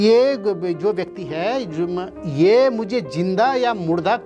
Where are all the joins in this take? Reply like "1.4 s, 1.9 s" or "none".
none